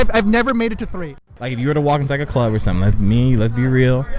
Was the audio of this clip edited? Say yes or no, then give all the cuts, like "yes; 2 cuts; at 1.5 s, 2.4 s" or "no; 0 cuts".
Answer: yes; 1 cut; at 1.0 s